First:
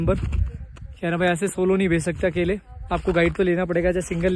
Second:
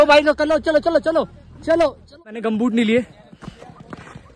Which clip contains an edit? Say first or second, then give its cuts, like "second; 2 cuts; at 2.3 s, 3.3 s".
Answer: second; 1 cut; at 2.3 s